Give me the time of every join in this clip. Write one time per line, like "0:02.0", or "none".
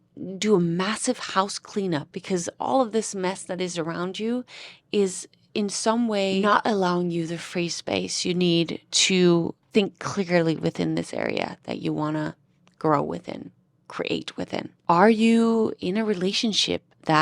0:02.1
0:06.4
0:09.6
0:14.7